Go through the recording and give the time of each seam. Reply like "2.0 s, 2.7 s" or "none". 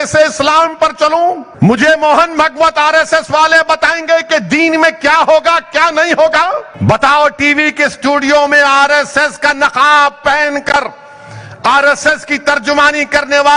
1.5 s, 6.7 s